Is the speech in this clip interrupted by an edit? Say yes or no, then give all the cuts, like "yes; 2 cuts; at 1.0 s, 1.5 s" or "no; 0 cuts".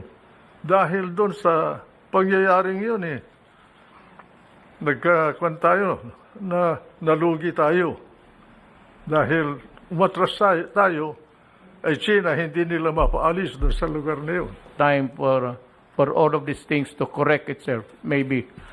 yes; 1 cut; at 14.7 s